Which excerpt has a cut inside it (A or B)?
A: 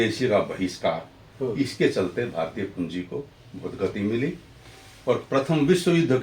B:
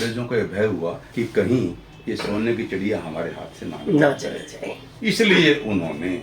B